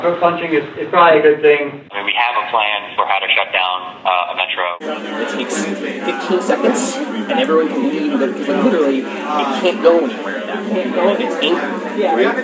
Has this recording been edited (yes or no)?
yes